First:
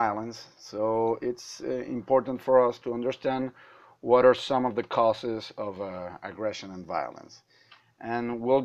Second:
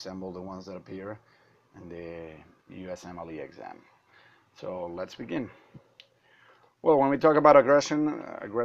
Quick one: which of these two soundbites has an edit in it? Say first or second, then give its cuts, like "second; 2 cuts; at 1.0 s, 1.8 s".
second; 1 cut; at 3.0 s